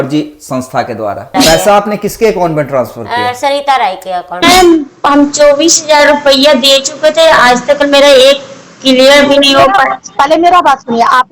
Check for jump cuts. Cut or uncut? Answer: cut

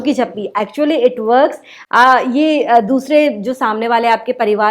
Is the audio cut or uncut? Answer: uncut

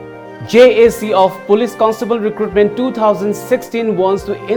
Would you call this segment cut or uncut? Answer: uncut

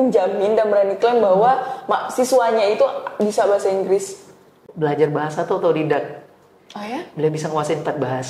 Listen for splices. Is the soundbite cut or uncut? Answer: cut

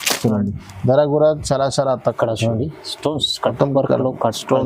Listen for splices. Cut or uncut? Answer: cut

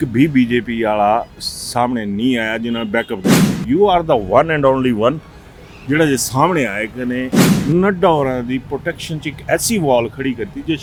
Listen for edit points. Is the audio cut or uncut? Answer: uncut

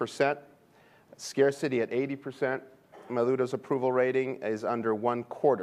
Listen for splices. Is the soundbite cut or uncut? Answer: uncut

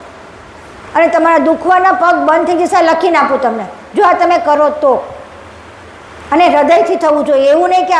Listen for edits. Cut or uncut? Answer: uncut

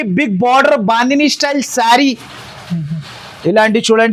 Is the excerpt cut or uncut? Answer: uncut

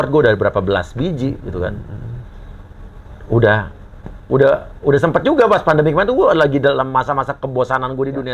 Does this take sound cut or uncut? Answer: uncut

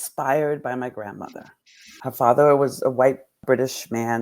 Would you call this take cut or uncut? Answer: cut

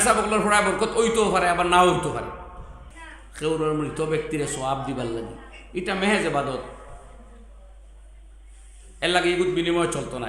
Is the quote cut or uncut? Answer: cut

